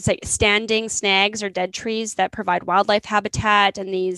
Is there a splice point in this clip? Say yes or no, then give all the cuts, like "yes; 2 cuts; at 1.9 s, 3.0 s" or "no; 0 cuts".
no; 0 cuts